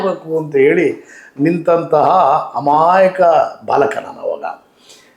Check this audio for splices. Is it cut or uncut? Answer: uncut